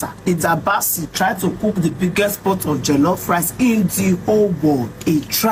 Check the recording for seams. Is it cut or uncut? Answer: uncut